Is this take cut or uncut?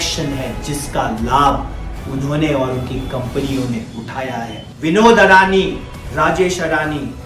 cut